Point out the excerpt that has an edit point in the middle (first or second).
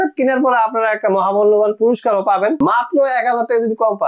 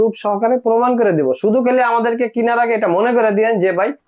first